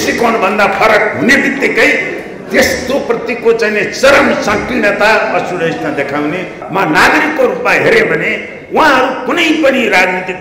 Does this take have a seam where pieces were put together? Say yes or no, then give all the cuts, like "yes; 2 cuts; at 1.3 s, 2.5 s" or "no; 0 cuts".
yes; 1 cut; at 6.6 s